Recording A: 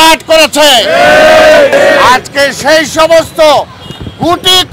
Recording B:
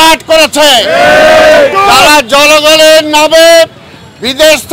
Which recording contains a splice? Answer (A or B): A